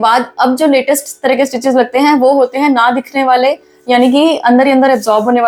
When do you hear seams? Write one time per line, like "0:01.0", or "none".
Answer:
none